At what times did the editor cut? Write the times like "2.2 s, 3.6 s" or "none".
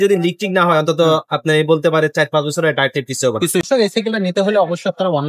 3.6 s